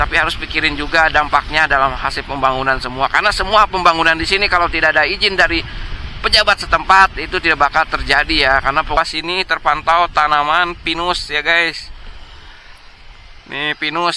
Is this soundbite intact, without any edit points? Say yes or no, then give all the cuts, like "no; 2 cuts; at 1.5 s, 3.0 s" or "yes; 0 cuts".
no; 1 cut; at 9.0 s